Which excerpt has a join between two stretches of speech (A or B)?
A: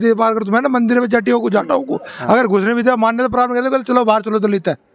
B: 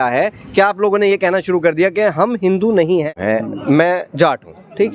B